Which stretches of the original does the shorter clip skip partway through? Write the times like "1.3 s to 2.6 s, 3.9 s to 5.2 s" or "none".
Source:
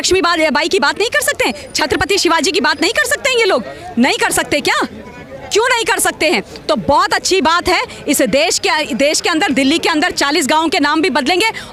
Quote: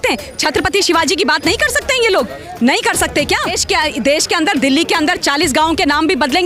4.9 s to 8.5 s